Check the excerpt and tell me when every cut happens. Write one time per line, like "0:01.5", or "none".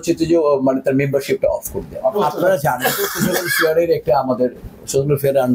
none